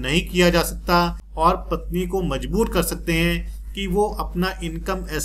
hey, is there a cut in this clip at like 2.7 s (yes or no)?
no